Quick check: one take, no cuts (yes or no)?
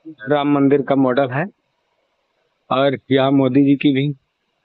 yes